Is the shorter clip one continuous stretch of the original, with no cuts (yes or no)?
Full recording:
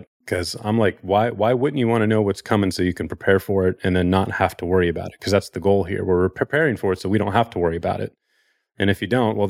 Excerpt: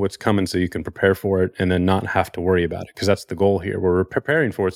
yes